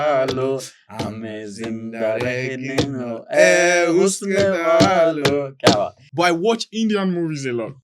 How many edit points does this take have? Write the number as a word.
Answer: one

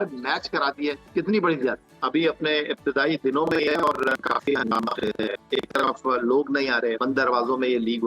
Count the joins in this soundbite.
three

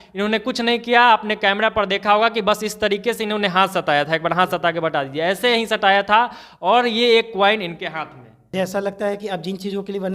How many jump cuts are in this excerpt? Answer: one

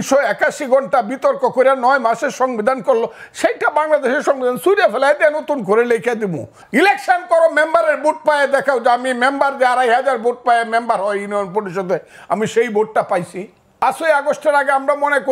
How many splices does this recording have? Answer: two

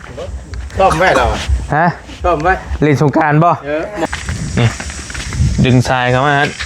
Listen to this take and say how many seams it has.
one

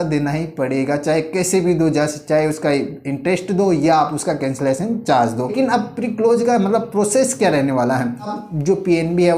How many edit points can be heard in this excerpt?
two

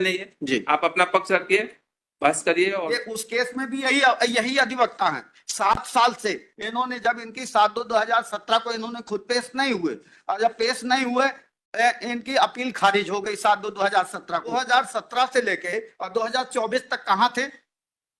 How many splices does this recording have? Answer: two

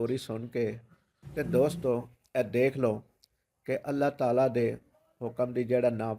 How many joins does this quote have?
one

